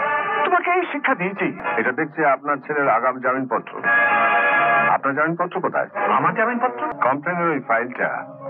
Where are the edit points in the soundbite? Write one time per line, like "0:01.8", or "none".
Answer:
0:01.6
0:06.9

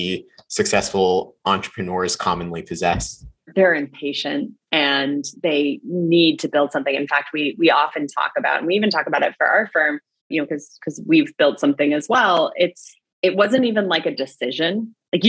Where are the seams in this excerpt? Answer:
0:03.5

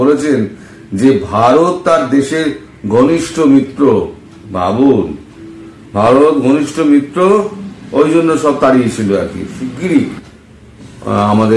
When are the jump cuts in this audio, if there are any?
0:09.6

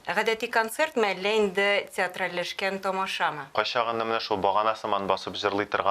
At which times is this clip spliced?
0:03.5

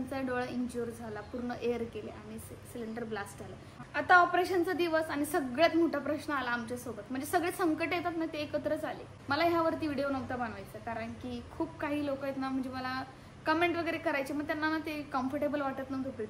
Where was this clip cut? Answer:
0:03.8
0:09.1

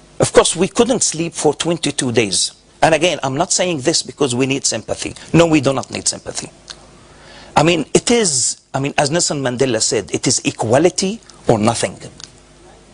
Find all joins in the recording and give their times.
0:04.4

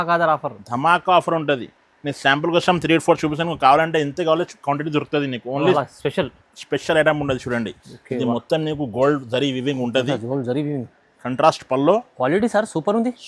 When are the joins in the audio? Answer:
0:05.7

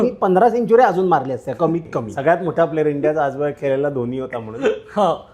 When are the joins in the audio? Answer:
0:02.0

